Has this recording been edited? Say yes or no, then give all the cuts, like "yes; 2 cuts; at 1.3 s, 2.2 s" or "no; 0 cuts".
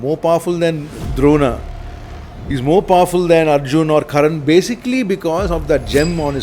no; 0 cuts